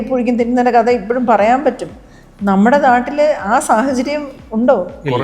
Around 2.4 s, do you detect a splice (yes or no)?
no